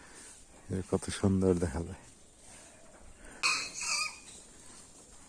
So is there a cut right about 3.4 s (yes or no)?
yes